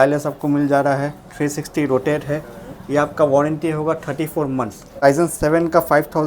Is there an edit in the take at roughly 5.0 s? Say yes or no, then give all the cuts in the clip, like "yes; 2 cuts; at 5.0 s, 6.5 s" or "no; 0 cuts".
yes; 1 cut; at 5.0 s